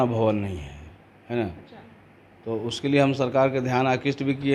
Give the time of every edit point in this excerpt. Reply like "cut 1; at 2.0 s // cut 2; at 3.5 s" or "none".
none